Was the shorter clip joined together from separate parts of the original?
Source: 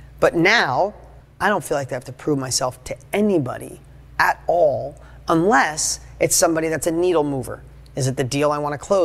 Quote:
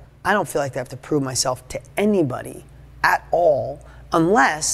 no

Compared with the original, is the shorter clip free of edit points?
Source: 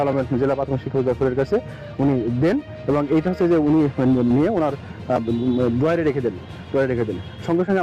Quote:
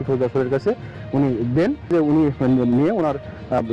no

